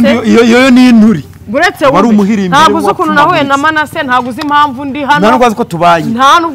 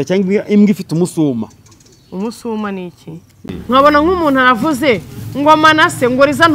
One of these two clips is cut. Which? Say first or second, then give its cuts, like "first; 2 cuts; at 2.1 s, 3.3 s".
second; 1 cut; at 3.5 s